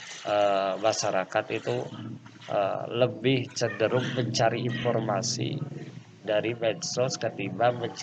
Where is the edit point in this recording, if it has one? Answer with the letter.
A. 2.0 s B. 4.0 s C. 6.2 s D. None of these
D